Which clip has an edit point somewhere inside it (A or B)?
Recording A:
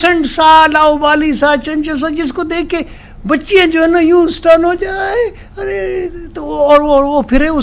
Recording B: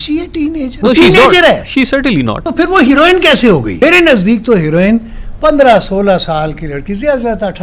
B